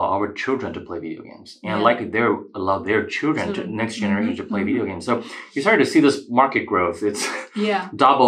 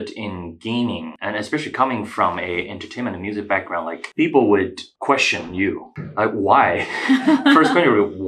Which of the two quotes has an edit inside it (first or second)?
second